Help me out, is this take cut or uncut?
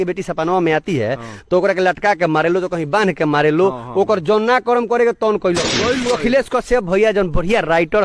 cut